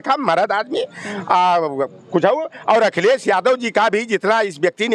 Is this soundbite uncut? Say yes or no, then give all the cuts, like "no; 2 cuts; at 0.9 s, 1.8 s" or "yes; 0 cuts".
yes; 0 cuts